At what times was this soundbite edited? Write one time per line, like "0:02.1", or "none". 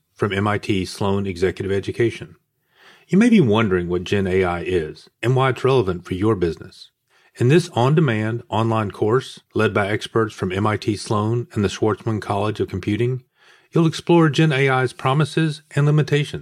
none

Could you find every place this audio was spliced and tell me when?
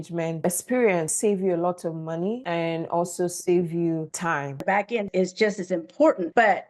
0:01.1
0:04.6

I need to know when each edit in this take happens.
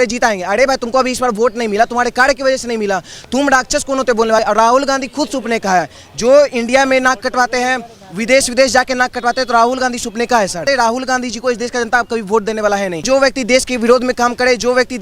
0:04.4
0:10.6
0:13.0

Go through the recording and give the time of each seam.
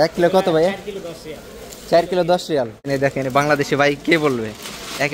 0:02.9

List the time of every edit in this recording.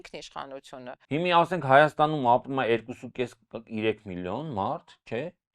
0:00.9

